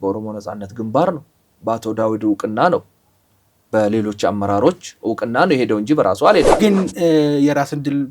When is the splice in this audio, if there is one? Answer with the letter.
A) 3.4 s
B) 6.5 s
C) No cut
B